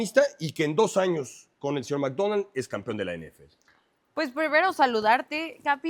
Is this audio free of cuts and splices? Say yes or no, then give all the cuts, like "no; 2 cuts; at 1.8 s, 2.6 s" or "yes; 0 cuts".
yes; 0 cuts